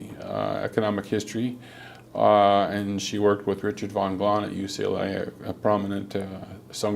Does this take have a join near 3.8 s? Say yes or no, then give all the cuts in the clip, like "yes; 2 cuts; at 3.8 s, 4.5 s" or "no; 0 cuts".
yes; 1 cut; at 3.8 s